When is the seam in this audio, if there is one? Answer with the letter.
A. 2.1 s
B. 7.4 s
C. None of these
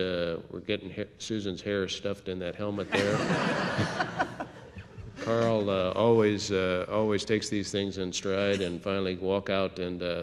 B